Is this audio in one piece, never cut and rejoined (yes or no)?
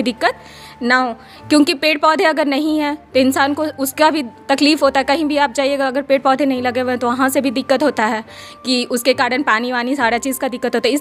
yes